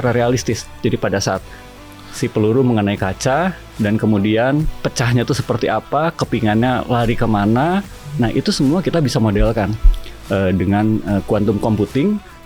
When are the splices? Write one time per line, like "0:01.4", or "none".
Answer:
0:08.2